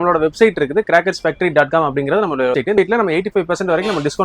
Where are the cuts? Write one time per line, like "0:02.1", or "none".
0:02.8

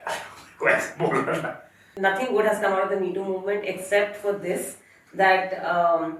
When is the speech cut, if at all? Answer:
0:01.9

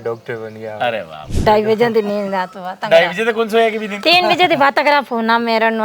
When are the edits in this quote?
0:01.4

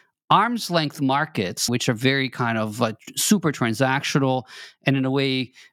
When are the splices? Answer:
0:01.7

